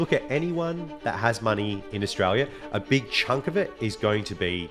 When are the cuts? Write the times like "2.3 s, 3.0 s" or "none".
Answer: none